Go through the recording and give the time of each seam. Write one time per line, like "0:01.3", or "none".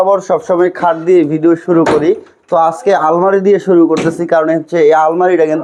none